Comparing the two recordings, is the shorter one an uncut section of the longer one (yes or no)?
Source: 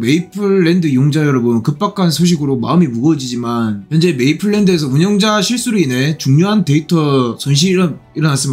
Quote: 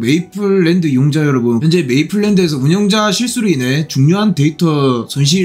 no